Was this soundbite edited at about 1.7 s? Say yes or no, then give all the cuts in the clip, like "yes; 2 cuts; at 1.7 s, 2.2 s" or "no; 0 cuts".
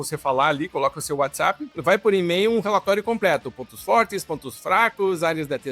yes; 1 cut; at 1.7 s